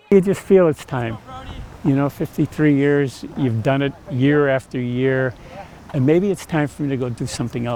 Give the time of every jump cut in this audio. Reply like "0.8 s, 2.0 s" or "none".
none

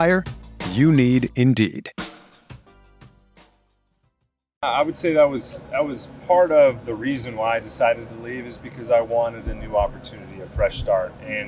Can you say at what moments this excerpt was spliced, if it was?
4.6 s

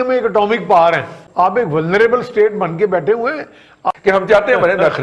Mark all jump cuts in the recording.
1.2 s, 3.9 s

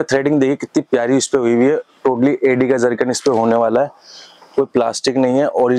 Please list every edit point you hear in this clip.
none

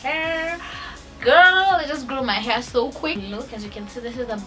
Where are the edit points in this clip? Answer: 3.2 s

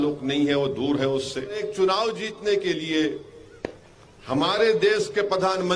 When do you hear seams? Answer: 1.6 s

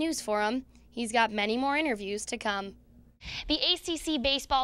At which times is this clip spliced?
3.1 s

